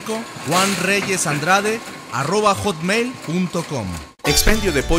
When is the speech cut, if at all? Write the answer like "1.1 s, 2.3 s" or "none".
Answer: 4.0 s